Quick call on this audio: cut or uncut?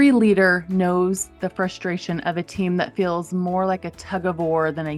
uncut